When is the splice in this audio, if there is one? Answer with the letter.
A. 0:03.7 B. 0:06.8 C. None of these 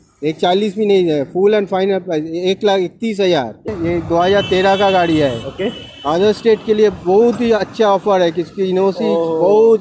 A